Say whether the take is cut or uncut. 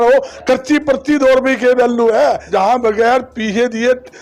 cut